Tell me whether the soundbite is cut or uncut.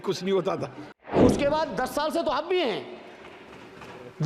cut